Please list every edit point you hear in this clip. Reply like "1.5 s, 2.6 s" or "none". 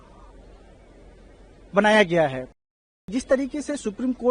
2.5 s

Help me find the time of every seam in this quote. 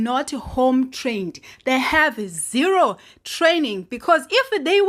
none

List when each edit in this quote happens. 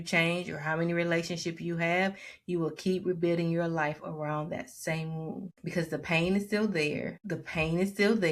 5.5 s, 7.2 s

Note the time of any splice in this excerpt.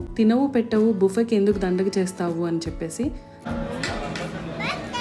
3.4 s

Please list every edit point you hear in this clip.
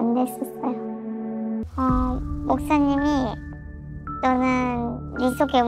1.6 s

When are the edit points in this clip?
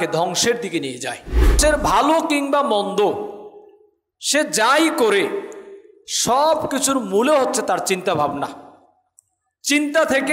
1.6 s

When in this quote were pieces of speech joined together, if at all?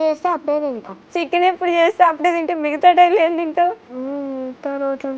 1.0 s, 3.8 s

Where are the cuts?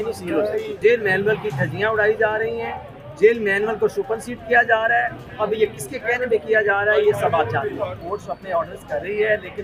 0.8 s, 8.1 s

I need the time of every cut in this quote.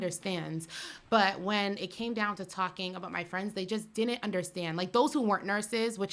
none

